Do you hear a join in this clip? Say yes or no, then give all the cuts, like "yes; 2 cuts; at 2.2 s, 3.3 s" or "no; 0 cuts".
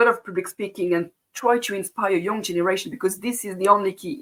no; 0 cuts